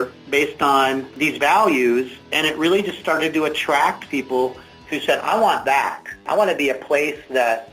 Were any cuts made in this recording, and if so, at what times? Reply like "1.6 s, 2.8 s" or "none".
6.2 s